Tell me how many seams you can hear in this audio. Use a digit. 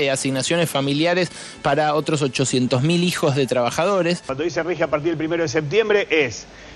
1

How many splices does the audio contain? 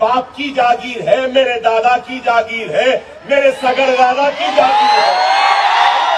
0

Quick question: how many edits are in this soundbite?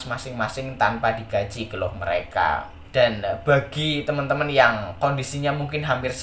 1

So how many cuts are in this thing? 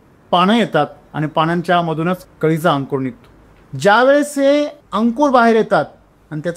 1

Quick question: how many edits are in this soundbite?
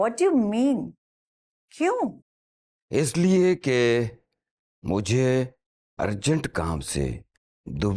0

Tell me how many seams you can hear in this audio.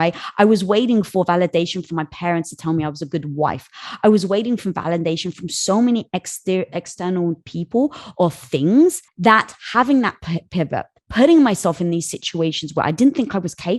1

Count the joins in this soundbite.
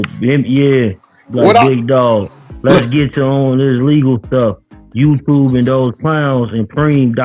0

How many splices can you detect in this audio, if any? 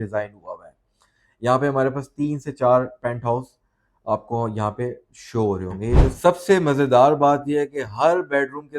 1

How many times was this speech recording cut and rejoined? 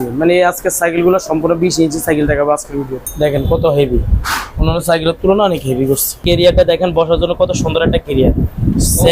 2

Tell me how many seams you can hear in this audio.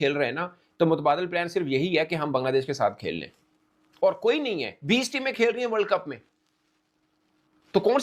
0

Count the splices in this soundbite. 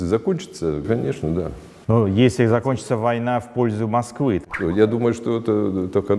2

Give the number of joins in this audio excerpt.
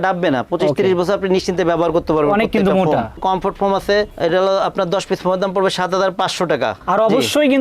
1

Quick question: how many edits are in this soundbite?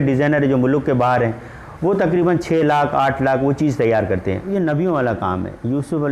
1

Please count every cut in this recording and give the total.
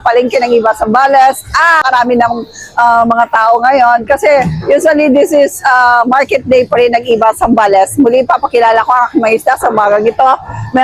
1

